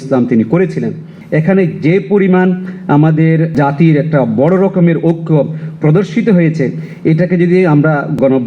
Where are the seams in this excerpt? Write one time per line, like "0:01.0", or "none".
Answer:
0:01.2